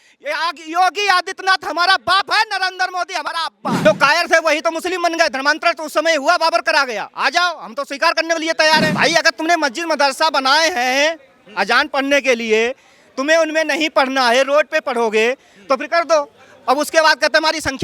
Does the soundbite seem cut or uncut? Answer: cut